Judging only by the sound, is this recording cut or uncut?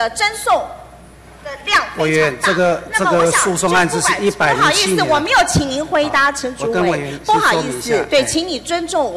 uncut